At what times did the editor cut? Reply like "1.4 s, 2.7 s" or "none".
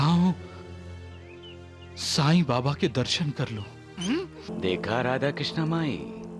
4.5 s

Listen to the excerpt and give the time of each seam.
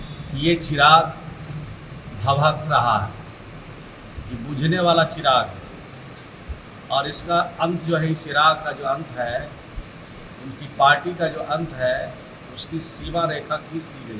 none

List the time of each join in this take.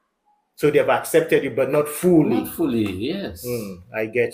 none

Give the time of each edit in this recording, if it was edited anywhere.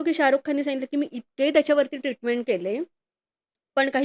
none

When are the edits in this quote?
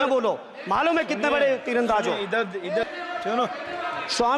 none

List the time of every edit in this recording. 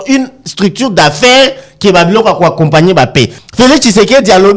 3.4 s

